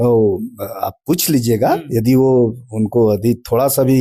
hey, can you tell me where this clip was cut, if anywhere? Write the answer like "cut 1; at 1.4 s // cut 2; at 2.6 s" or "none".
none

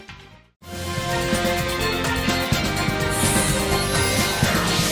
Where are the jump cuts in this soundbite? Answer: none

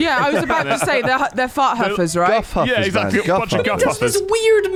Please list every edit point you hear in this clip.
none

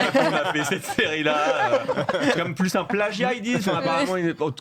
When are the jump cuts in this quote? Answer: none

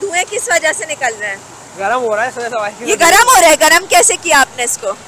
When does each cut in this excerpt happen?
none

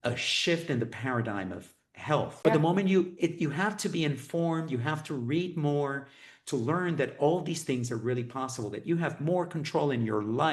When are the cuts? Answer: cut 1; at 2.4 s

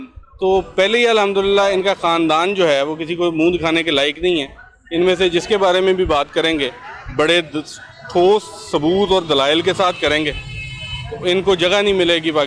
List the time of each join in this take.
none

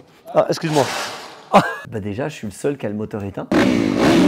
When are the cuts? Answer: cut 1; at 1.8 s

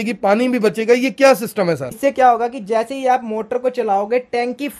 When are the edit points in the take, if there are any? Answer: cut 1; at 1.9 s

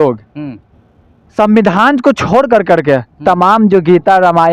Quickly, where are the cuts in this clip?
none

